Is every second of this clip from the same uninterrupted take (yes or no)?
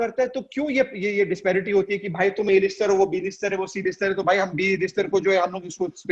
yes